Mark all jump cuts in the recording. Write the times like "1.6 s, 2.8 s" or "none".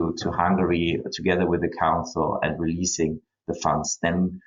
none